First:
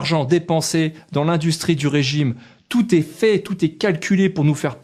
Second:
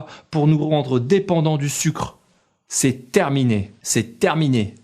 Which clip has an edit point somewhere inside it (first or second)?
second